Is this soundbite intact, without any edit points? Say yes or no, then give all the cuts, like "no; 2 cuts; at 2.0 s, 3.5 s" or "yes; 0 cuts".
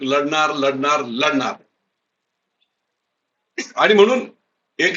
yes; 0 cuts